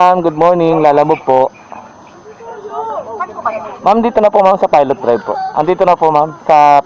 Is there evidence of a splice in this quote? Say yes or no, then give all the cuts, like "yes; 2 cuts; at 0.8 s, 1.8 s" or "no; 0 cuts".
no; 0 cuts